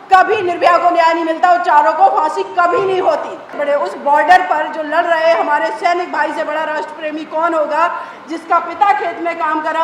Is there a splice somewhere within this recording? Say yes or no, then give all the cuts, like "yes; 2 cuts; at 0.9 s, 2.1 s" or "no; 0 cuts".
yes; 1 cut; at 3.5 s